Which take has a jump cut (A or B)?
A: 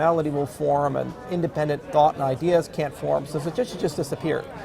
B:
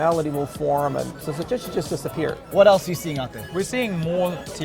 B